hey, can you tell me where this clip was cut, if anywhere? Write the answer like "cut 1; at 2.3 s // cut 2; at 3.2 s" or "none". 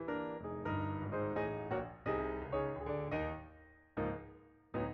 none